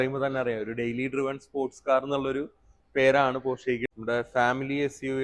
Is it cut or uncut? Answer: cut